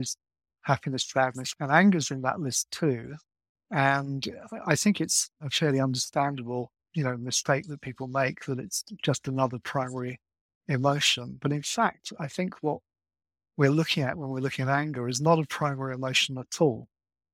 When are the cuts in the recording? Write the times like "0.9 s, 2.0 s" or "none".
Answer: 1.4 s, 5.4 s